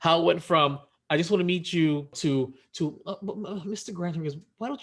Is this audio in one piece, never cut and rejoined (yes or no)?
no